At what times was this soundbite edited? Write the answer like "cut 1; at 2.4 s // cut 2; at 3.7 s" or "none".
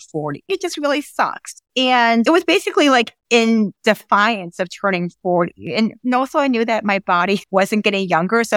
cut 1; at 2.2 s